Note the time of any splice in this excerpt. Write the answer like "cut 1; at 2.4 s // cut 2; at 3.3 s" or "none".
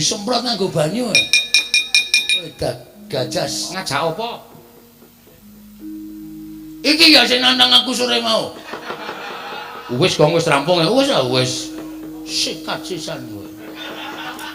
cut 1; at 3.7 s